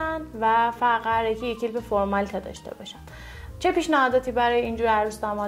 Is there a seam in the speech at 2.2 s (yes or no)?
no